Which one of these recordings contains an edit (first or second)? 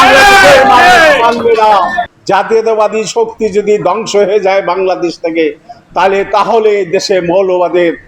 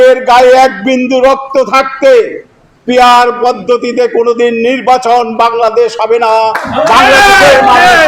first